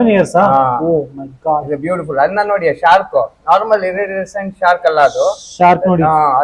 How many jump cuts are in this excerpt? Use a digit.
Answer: 0